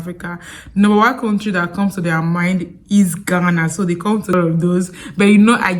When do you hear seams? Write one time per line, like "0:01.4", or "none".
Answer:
0:04.3